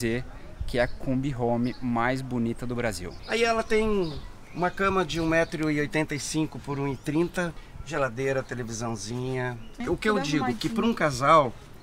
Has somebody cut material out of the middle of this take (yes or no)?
yes